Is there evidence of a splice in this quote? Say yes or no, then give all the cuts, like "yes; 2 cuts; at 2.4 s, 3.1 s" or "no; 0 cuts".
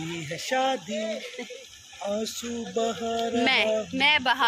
no; 0 cuts